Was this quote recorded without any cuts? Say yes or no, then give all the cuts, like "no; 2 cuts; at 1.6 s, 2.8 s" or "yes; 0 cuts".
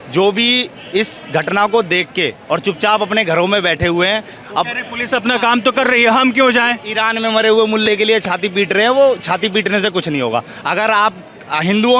yes; 0 cuts